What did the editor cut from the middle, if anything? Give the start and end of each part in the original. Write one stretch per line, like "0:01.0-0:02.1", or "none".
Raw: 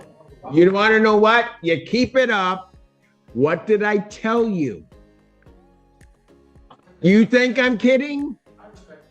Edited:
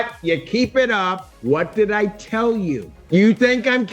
0:02.7-0:03.2
0:04.8-0:06.8